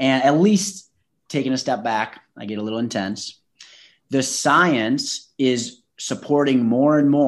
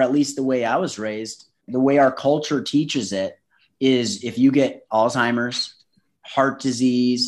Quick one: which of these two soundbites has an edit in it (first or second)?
second